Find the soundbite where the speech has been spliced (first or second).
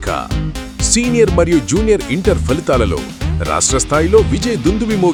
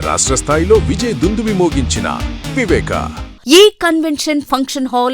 second